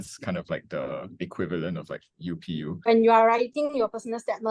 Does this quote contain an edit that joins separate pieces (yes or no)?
yes